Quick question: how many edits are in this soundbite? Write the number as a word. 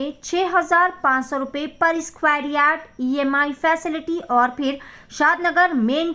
zero